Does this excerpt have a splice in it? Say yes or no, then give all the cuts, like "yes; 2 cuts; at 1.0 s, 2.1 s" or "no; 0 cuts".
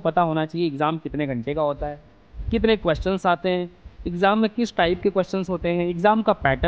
no; 0 cuts